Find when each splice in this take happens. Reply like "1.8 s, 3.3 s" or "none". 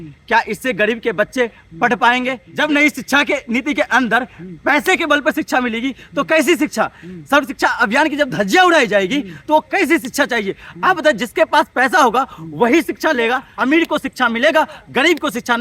2.4 s, 13.5 s